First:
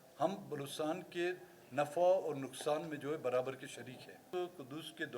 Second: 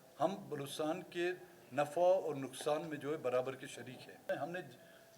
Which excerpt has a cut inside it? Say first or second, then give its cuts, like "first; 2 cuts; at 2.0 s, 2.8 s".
second; 1 cut; at 4.3 s